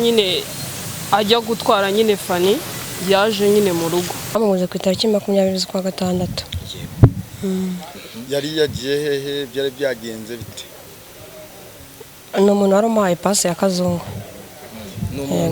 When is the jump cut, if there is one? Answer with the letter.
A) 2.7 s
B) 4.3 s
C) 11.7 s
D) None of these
B